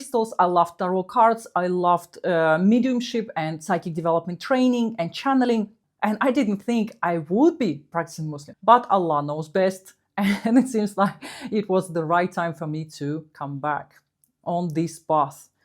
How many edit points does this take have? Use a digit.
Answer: 1